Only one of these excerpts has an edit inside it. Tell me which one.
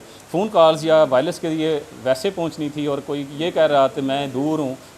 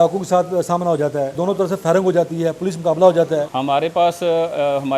second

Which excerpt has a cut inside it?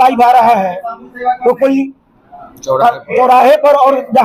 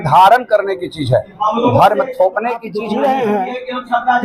second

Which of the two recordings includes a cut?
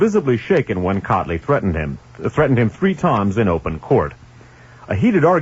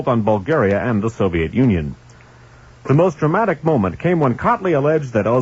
second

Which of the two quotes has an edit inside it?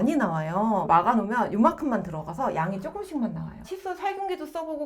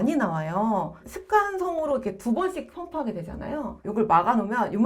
first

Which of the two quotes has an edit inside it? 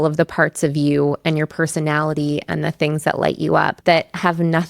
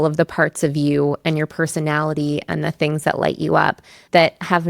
first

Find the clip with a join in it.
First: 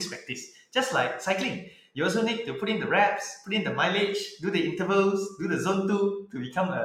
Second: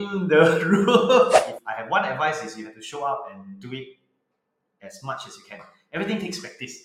second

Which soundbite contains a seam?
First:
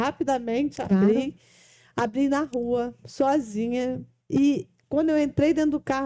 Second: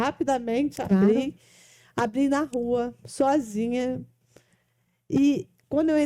first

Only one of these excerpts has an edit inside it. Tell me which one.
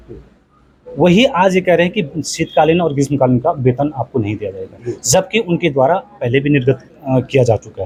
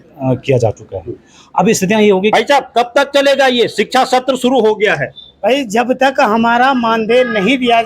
second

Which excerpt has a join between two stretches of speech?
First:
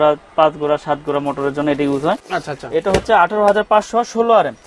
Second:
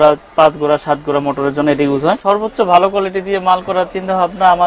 second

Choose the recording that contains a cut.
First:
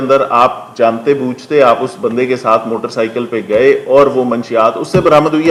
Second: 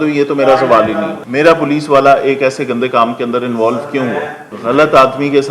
second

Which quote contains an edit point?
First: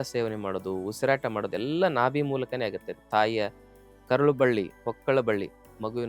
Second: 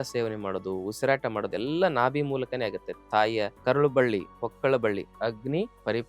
second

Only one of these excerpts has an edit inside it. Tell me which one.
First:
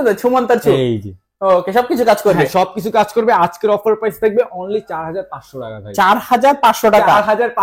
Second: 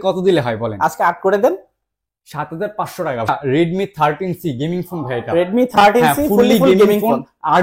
second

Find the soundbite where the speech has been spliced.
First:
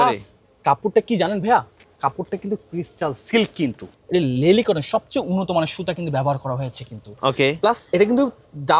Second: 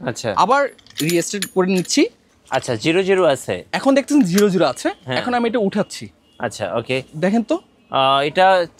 first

